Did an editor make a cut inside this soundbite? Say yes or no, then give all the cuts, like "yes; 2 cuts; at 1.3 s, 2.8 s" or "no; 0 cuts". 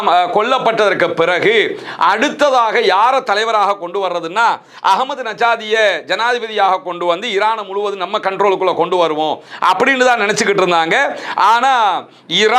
no; 0 cuts